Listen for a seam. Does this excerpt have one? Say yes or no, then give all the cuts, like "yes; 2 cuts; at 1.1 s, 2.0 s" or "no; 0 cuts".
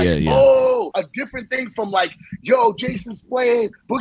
yes; 1 cut; at 0.9 s